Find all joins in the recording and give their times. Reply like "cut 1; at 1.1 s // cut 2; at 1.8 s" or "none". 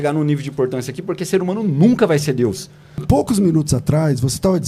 cut 1; at 3.0 s